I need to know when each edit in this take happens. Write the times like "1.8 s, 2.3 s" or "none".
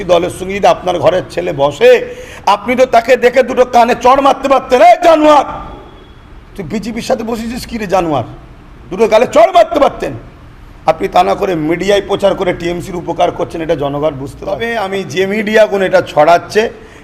14.7 s